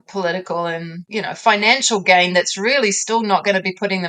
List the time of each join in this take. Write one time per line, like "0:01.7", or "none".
0:01.0

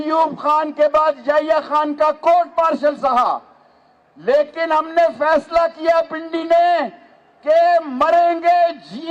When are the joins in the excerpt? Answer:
none

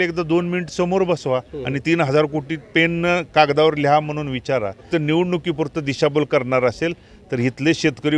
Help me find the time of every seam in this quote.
0:04.8

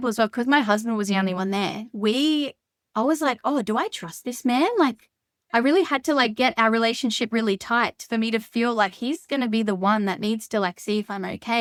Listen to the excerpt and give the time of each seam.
none

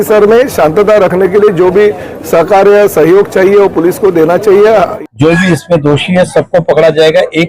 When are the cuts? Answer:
0:04.8

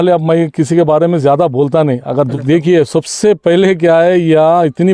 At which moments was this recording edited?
0:02.3

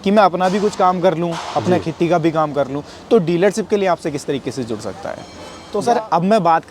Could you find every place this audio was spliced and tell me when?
0:05.6

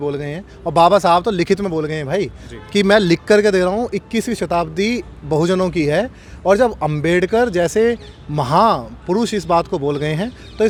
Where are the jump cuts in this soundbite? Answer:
none

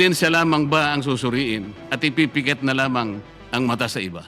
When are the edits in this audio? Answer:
0:03.3

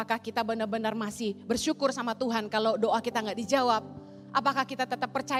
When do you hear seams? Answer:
none

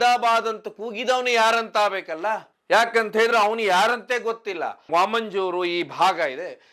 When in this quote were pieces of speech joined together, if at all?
0:04.9

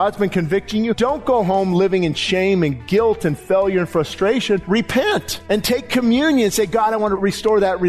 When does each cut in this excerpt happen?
0:01.0
0:04.6
0:05.3
0:07.2

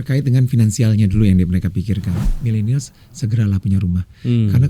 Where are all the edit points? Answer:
0:02.3

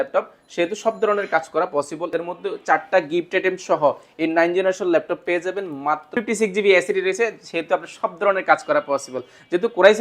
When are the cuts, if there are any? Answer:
0:02.1
0:06.1

